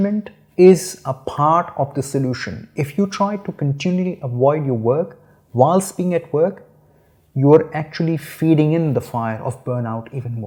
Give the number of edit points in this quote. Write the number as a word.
zero